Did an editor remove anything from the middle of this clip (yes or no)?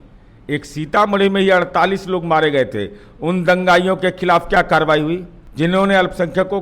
yes